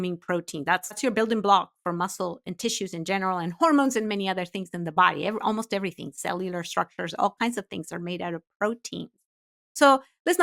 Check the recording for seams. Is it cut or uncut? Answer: cut